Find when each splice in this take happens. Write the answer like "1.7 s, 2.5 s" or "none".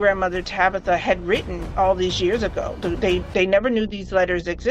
none

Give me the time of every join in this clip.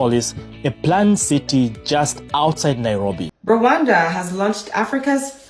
3.2 s

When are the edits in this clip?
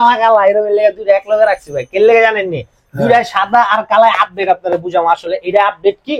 none

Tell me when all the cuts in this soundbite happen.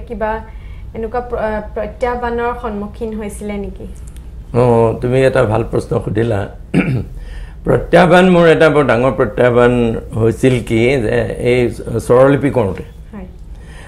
none

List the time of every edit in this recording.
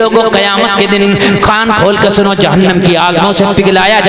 none

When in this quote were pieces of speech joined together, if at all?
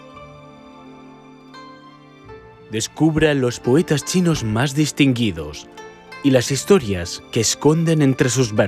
2.7 s

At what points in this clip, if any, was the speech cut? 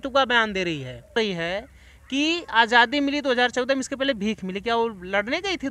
1.2 s

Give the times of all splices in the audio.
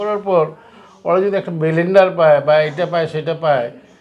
none

